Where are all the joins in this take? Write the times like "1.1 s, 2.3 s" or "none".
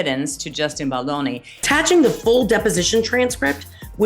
1.5 s